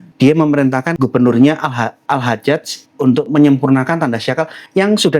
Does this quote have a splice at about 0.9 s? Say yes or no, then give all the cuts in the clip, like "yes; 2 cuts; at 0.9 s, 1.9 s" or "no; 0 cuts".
yes; 1 cut; at 0.9 s